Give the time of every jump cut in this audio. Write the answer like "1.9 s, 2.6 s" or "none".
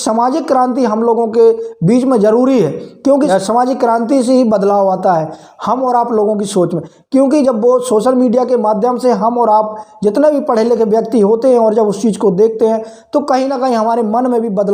3.3 s